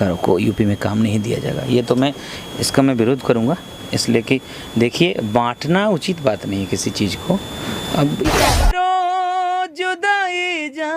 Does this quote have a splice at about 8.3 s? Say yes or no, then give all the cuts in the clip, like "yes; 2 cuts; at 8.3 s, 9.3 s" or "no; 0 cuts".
yes; 1 cut; at 8.3 s